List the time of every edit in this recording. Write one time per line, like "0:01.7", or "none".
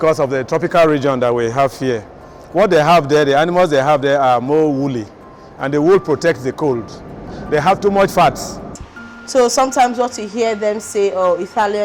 0:07.3
0:08.7